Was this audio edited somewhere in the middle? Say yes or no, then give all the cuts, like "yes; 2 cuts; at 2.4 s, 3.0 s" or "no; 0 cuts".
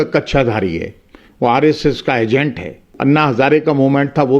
yes; 1 cut; at 2.9 s